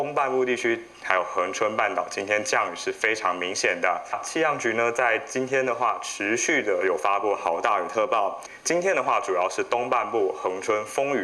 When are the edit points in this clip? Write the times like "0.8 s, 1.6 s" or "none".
4.2 s, 8.5 s